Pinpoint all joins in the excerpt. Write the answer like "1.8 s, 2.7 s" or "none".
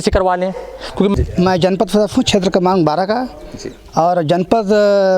1.1 s